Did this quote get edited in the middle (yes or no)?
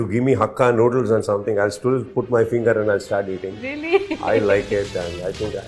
no